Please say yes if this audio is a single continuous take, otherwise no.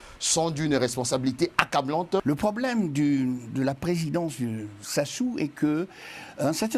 no